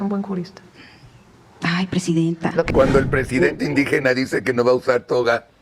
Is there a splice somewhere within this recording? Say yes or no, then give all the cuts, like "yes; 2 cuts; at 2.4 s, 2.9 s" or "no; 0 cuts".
yes; 1 cut; at 2.7 s